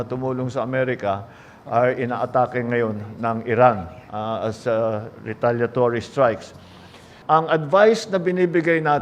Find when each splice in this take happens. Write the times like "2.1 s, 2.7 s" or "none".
7.1 s